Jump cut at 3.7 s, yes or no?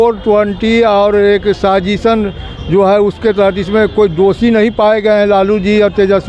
no